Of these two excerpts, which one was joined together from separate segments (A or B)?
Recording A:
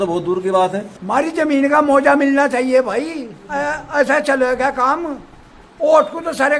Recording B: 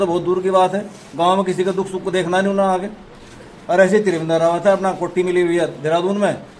A